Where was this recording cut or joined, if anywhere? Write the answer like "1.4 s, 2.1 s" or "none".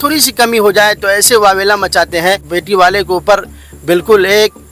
2.5 s